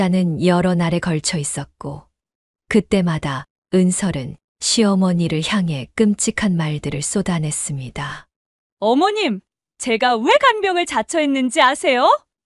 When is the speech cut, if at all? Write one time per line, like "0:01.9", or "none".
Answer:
none